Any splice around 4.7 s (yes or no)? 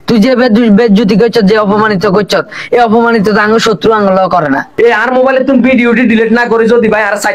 yes